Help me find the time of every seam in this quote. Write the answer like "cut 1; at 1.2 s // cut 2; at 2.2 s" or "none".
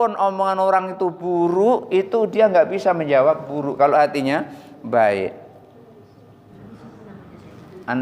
cut 1; at 6.5 s